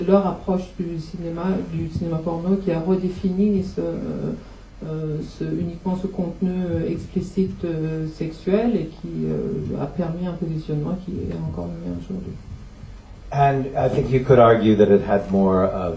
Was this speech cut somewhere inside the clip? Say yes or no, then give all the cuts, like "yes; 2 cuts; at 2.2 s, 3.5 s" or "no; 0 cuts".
no; 0 cuts